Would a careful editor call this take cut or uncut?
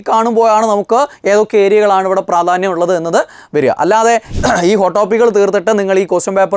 cut